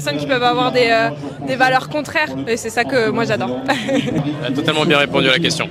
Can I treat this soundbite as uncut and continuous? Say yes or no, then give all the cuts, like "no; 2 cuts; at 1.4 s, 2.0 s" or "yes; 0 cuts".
no; 2 cuts; at 2.4 s, 4.2 s